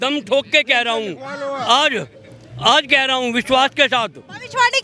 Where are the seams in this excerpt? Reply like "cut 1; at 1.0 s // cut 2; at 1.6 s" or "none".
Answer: none